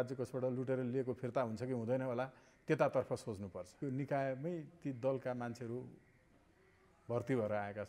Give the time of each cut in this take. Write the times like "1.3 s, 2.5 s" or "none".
3.7 s